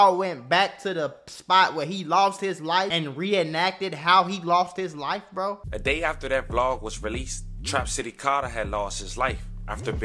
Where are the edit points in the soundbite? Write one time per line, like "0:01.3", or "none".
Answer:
0:02.9
0:05.7